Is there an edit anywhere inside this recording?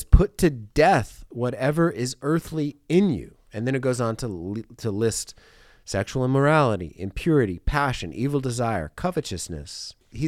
no; 0 cuts

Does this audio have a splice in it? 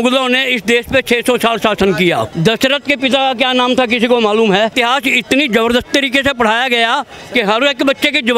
yes; 2 cuts; at 2.3 s, 4.7 s

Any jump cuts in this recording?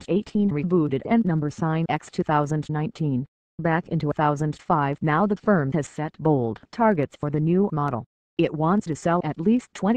yes; 1 cut; at 6.8 s

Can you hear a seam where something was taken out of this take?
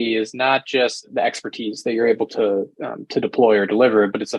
yes; 1 cut; at 1.1 s

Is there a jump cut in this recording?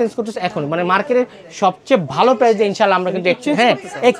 no; 0 cuts

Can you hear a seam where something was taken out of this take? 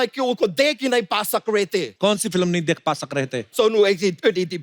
yes; 2 cuts; at 1.9 s, 3.5 s

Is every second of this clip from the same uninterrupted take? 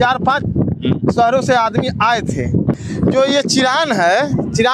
no; 1 cut; at 2.8 s

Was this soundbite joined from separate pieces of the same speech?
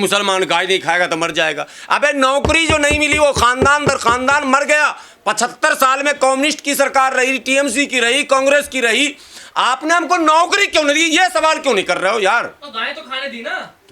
no; 0 cuts

